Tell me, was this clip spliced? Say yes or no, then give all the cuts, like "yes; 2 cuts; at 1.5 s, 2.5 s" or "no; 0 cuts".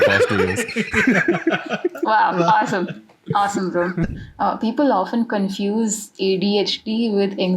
yes; 1 cut; at 4.2 s